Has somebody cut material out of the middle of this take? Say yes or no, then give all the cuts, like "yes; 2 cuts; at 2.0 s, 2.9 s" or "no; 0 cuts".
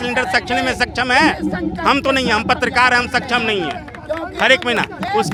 no; 0 cuts